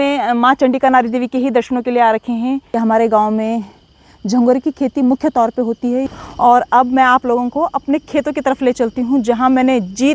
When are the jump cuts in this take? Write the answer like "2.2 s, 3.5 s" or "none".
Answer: 2.7 s, 6.1 s